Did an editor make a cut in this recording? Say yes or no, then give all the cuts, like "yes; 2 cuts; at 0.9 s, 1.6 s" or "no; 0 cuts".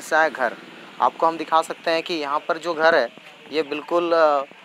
no; 0 cuts